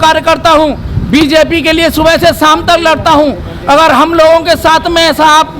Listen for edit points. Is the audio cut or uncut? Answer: uncut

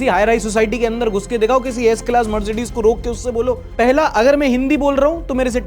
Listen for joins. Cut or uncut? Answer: cut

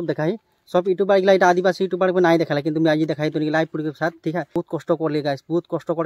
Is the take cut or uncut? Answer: cut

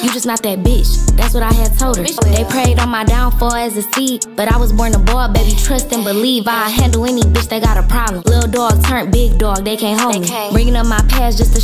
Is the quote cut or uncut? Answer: uncut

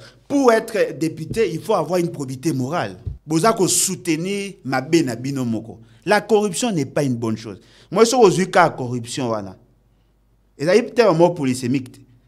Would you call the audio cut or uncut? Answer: cut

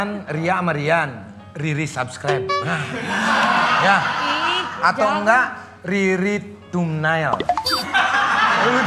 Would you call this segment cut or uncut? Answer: uncut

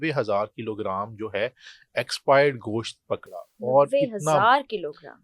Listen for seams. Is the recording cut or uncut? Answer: uncut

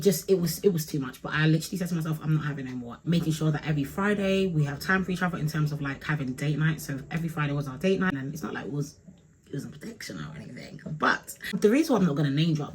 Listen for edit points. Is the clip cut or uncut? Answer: cut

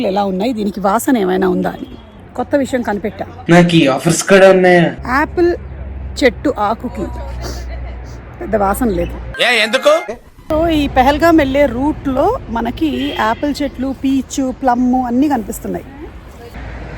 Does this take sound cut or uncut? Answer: uncut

